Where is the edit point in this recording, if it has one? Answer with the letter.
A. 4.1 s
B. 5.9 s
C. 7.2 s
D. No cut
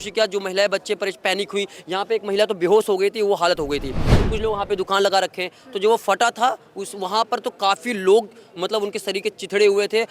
A